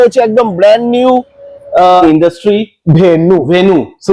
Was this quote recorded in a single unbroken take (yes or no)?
no